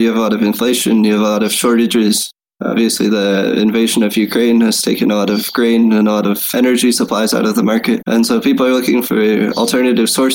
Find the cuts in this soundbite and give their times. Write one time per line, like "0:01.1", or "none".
0:06.5
0:08.0